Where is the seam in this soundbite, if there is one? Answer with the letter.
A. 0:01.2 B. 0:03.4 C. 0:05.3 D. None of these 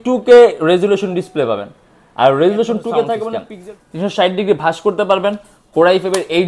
B